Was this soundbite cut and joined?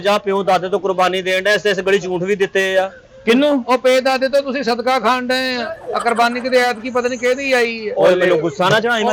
no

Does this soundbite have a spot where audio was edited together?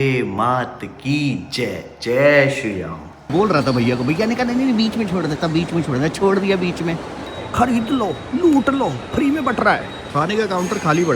yes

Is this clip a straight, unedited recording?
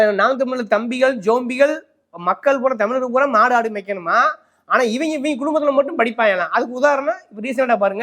yes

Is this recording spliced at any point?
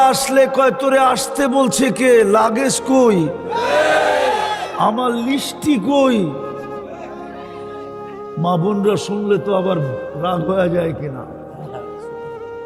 yes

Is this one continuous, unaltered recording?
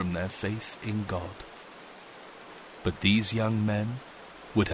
yes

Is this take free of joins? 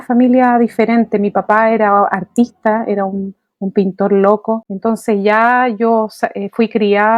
yes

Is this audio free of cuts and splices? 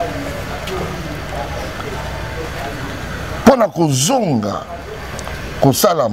yes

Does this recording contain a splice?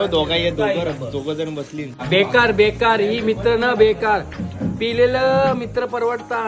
yes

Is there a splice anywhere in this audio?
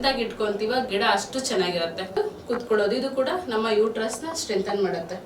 yes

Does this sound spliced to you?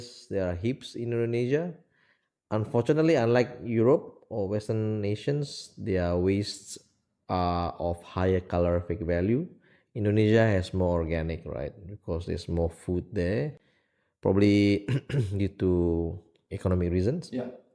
no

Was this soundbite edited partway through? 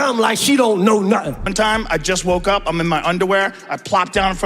yes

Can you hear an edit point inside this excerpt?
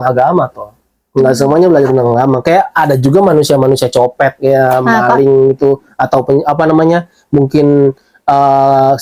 no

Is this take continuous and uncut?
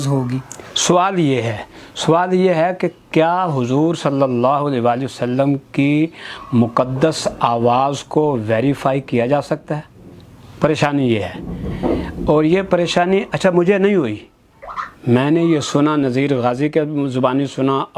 yes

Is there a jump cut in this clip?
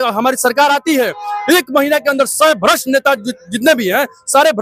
no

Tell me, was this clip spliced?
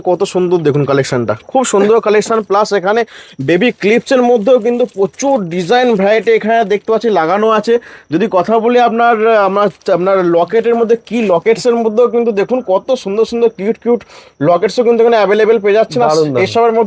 no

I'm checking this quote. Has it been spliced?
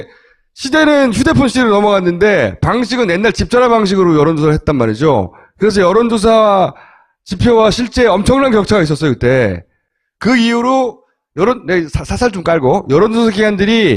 yes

